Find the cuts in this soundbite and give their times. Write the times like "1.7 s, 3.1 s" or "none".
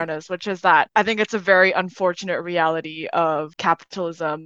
0.9 s, 3.5 s